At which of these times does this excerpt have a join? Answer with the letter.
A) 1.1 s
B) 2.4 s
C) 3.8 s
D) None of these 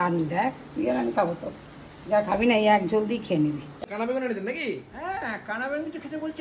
C